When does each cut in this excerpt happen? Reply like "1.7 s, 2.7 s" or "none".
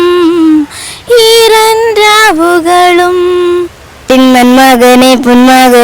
3.9 s